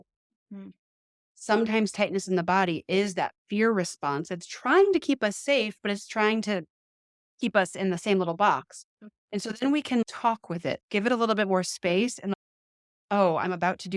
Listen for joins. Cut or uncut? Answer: cut